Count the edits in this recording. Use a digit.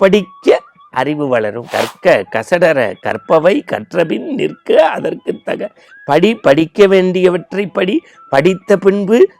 1